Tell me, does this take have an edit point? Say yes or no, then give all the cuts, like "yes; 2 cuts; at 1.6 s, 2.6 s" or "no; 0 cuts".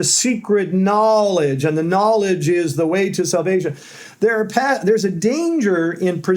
no; 0 cuts